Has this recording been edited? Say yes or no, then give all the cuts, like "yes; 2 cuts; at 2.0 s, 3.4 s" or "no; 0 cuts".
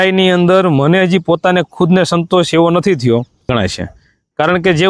yes; 1 cut; at 3.4 s